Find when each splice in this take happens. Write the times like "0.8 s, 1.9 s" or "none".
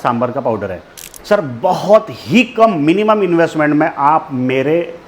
1.1 s